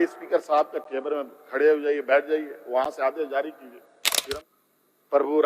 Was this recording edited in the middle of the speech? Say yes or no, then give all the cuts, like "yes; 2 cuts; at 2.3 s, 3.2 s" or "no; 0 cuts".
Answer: yes; 1 cut; at 4.3 s